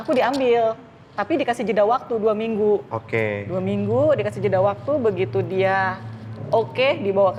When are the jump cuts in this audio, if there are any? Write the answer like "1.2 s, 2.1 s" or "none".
none